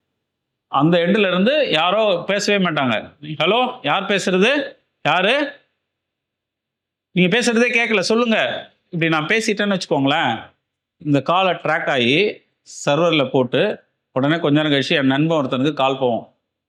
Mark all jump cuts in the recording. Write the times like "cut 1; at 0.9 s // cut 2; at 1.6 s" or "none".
none